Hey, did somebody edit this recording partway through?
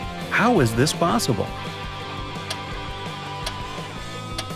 yes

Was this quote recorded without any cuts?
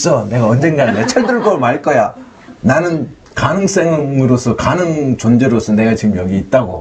yes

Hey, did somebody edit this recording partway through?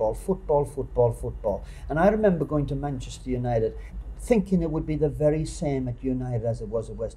yes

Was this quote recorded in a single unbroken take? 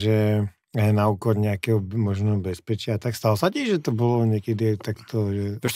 yes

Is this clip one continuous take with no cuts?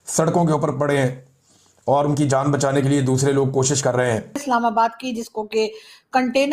no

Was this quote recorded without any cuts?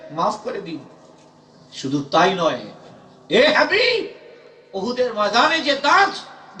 yes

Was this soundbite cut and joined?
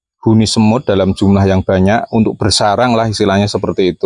no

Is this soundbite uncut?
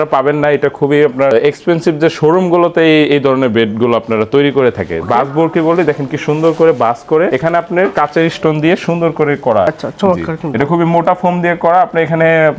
yes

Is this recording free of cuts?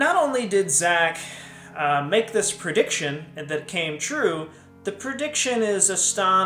yes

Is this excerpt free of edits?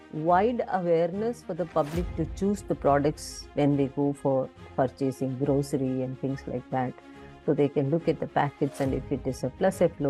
yes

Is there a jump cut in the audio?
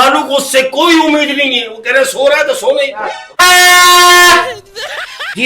yes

